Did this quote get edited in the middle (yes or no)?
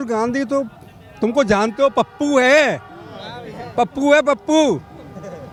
no